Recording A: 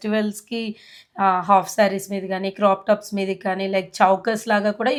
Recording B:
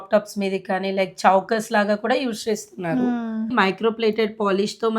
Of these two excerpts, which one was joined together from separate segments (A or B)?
B